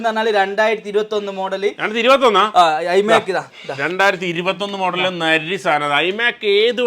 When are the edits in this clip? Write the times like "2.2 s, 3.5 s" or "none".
none